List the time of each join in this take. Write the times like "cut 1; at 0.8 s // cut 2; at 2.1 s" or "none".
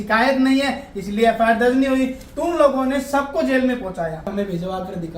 cut 1; at 4.3 s